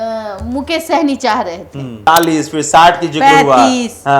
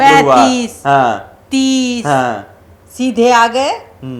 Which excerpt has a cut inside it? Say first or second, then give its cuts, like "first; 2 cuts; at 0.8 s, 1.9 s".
first; 1 cut; at 2.1 s